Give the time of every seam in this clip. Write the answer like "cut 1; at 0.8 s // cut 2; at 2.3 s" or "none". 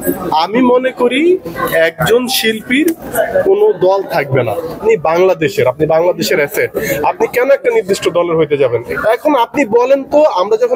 cut 1; at 4.8 s // cut 2; at 8.9 s